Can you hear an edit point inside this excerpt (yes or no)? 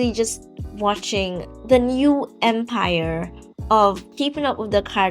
yes